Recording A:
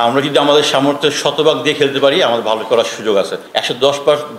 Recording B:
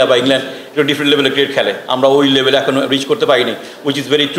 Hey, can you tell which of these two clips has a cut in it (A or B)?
A